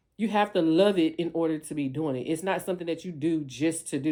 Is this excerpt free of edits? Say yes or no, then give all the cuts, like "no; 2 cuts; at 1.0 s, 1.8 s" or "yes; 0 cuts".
yes; 0 cuts